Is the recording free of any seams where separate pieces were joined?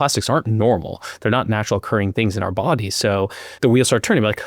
no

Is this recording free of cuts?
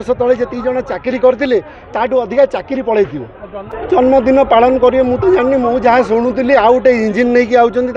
no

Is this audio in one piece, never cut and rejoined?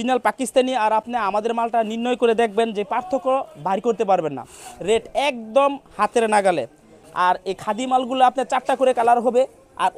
yes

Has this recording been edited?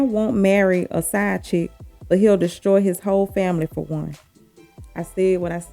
no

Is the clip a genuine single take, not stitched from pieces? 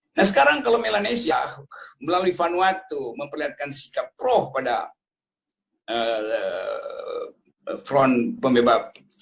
no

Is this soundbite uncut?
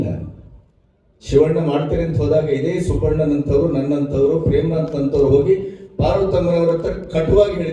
yes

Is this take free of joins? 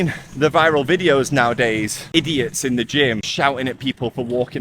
no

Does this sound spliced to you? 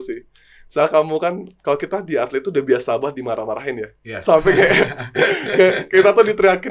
no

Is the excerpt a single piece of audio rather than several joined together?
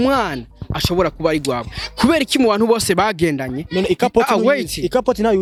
yes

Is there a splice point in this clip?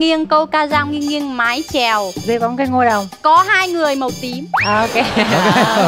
yes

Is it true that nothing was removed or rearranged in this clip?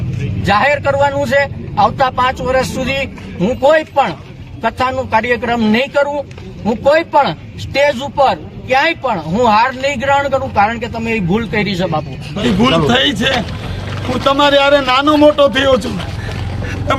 no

